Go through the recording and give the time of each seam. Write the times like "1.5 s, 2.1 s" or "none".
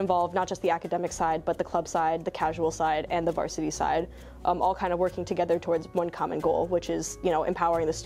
none

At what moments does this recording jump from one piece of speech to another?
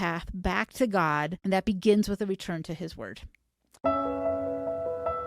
1.4 s, 3.7 s

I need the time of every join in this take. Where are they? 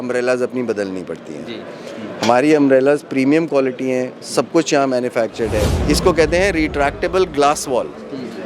5.8 s

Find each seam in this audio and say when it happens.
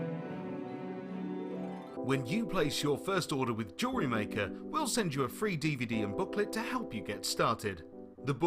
1.8 s

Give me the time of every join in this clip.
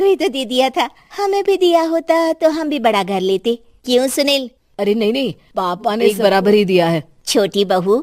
6.1 s

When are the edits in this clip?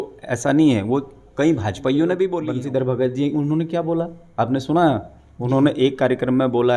2.4 s

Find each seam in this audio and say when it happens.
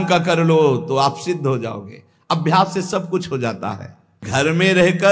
4.2 s

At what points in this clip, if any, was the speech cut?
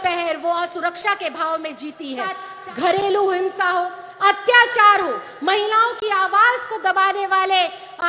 2.5 s

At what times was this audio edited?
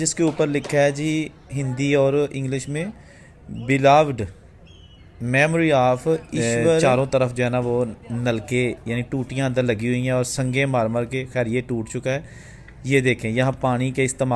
6.8 s

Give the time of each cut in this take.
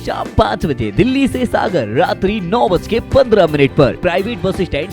4.0 s

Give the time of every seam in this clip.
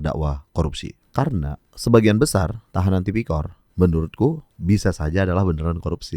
0.9 s, 1.7 s, 2.6 s, 3.6 s, 4.5 s

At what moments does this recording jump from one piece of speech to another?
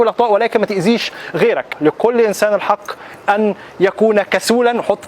1.7 s

